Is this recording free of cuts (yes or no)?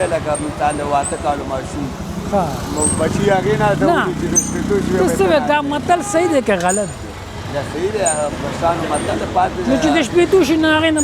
yes